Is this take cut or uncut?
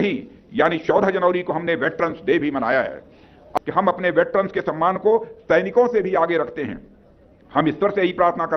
cut